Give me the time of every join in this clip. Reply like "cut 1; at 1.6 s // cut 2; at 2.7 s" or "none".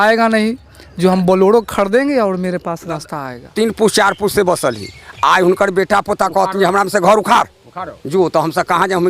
cut 1; at 3.1 s